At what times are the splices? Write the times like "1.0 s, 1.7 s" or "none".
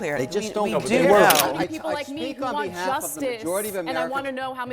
1.5 s